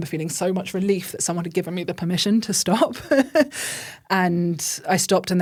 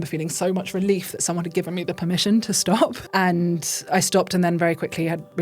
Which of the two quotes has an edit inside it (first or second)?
second